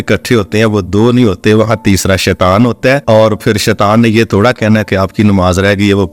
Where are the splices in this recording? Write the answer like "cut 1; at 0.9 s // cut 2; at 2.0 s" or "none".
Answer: cut 1; at 3.0 s